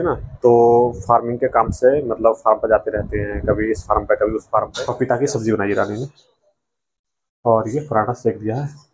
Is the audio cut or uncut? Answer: cut